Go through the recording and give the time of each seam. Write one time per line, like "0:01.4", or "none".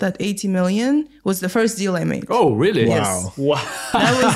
none